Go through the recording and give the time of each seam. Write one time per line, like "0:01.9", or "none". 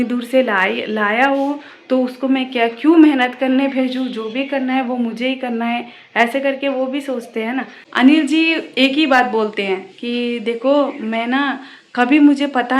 0:07.8